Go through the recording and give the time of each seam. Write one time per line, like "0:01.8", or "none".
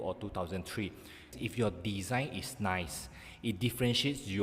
0:01.3